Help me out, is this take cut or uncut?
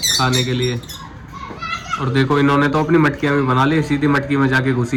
uncut